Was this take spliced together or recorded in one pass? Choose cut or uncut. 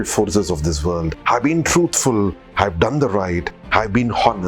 cut